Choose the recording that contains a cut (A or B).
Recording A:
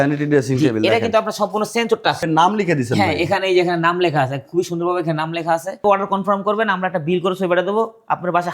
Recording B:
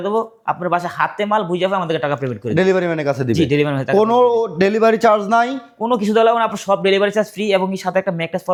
A